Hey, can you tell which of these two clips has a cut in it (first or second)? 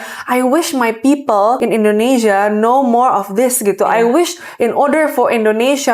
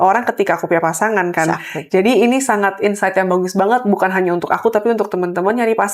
first